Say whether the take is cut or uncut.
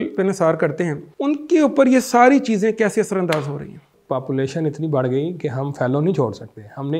cut